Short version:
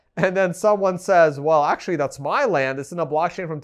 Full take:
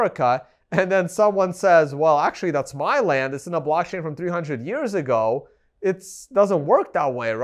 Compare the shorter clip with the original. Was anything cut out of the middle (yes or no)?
no